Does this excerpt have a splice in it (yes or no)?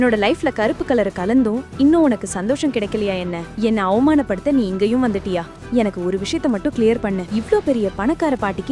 no